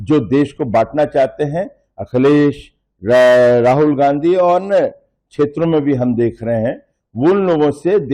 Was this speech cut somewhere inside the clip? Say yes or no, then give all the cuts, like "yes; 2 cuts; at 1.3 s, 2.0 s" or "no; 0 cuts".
no; 0 cuts